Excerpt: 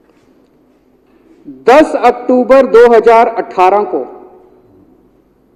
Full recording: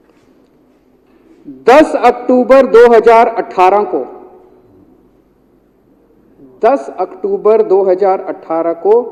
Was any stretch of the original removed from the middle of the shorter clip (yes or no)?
no